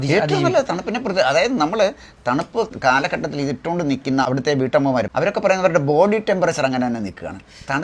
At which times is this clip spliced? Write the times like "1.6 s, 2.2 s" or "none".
2.7 s, 4.3 s